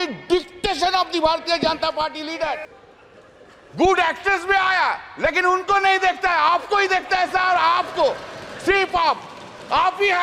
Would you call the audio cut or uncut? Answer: cut